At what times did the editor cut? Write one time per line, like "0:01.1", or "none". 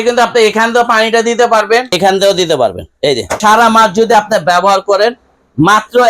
0:01.9
0:03.4